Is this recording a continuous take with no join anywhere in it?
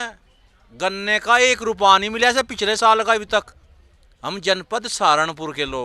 yes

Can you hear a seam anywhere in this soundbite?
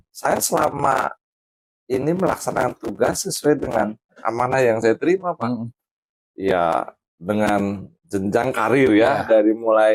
no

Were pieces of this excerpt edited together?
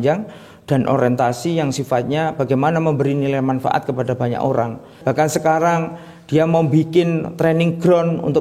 yes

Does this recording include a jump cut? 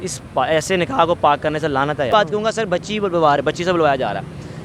yes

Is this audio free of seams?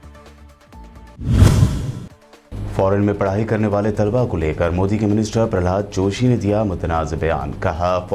no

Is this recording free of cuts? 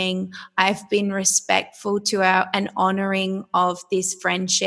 yes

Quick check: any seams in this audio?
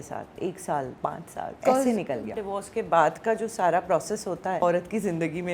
yes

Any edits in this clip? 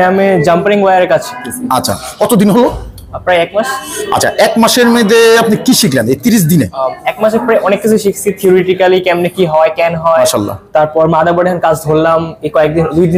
no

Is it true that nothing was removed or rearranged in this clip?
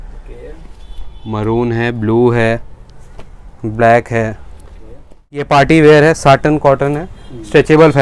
no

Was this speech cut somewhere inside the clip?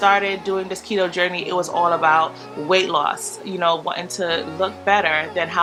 no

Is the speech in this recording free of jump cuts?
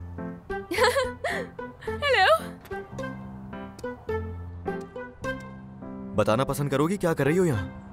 yes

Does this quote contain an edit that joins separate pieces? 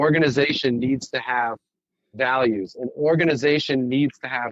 no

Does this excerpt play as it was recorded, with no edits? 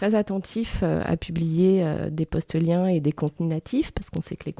yes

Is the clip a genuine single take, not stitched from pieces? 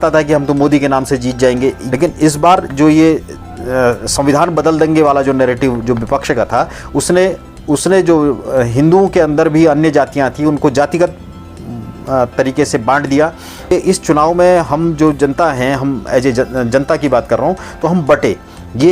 no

